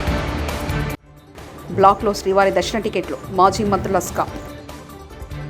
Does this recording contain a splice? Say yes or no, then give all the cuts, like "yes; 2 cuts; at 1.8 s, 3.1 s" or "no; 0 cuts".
no; 0 cuts